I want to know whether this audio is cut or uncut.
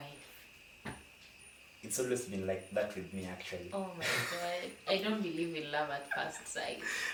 uncut